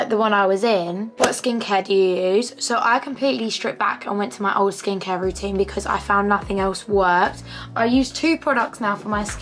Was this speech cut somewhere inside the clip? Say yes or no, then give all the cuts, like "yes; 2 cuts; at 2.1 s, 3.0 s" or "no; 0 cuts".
yes; 1 cut; at 1.1 s